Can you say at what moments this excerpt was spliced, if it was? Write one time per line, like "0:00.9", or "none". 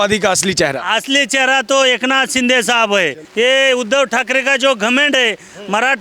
0:03.2